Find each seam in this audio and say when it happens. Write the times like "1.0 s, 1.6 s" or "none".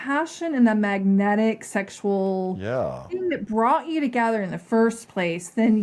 none